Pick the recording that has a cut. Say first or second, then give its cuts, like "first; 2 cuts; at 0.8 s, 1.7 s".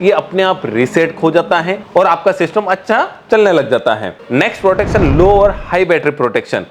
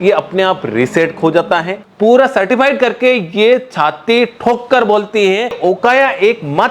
second; 2 cuts; at 1.8 s, 5.6 s